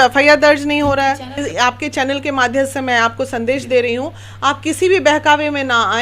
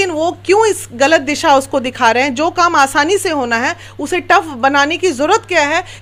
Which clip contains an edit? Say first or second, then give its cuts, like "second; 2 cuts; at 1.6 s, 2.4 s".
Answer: first; 1 cut; at 1.4 s